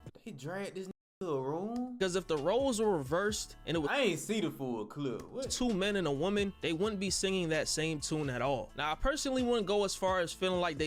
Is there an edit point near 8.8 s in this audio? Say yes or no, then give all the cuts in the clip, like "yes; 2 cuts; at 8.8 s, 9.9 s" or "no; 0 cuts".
no; 0 cuts